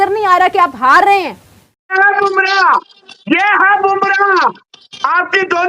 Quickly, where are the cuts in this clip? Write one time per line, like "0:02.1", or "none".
0:01.8